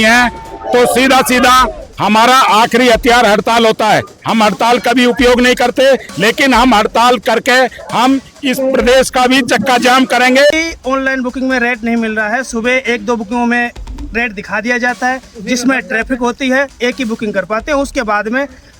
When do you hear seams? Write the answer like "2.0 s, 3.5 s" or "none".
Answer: 10.5 s